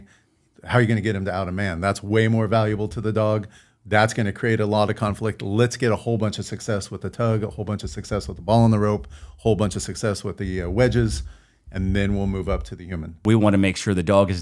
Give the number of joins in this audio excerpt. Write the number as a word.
one